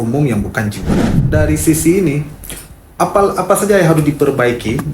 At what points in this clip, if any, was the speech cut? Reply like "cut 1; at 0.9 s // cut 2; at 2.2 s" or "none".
cut 1; at 1.2 s